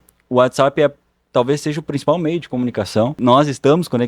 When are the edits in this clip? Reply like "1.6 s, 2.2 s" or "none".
3.2 s